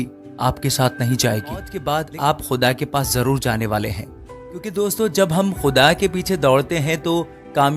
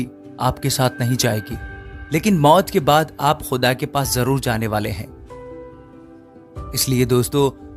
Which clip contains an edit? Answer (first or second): first